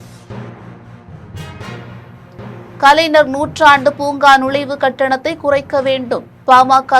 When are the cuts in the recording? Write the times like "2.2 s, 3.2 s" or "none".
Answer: 1.5 s